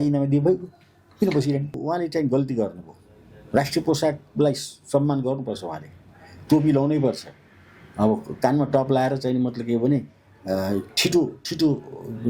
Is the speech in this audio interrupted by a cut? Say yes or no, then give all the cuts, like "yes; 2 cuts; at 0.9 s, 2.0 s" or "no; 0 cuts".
yes; 1 cut; at 1.7 s